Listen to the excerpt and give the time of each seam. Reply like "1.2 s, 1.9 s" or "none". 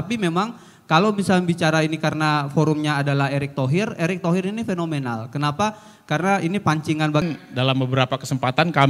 7.2 s